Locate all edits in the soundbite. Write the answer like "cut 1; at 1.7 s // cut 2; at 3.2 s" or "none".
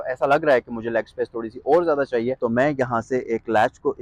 cut 1; at 2.4 s

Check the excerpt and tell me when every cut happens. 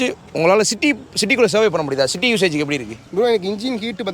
cut 1; at 3.0 s

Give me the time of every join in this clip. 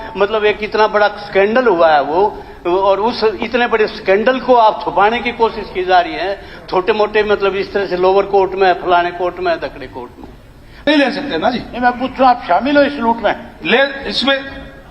cut 1; at 10.9 s

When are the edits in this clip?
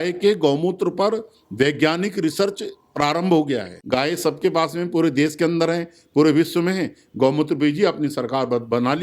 cut 1; at 3.7 s

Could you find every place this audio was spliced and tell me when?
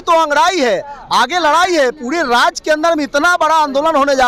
none

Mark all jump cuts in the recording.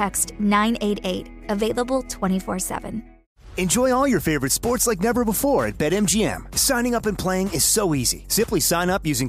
cut 1; at 3.2 s

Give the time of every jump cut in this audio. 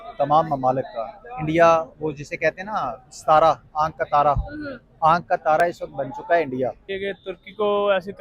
cut 1; at 6.9 s

